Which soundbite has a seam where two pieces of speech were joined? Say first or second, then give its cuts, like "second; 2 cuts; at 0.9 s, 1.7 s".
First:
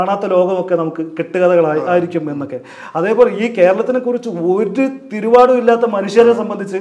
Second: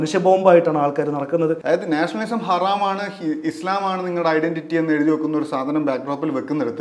second; 1 cut; at 1.6 s